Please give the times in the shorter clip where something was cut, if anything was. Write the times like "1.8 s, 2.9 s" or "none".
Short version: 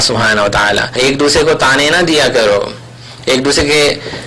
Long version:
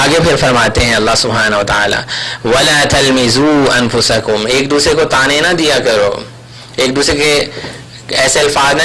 0.9 s